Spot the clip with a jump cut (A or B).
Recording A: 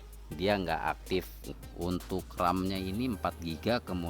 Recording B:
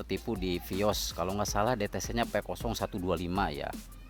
A